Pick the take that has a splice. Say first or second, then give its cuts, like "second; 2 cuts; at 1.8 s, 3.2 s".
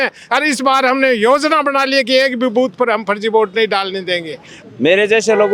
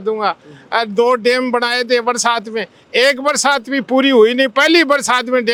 first; 1 cut; at 4.5 s